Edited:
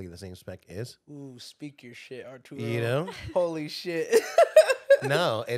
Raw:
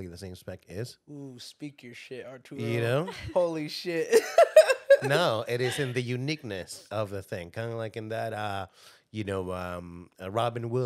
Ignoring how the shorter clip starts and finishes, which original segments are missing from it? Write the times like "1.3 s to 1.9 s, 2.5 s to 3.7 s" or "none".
none